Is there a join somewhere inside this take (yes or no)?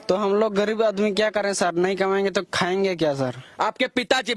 no